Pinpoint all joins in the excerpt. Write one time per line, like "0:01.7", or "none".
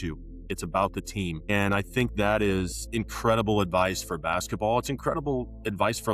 0:01.5
0:02.8